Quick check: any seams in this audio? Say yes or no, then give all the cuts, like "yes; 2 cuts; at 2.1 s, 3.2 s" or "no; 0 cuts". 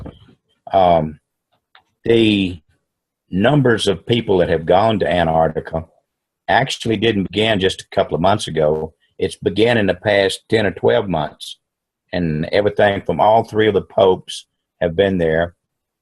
yes; 1 cut; at 3.2 s